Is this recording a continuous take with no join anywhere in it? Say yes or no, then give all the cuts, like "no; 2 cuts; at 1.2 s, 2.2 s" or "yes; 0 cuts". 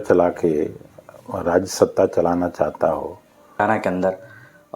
no; 1 cut; at 3.6 s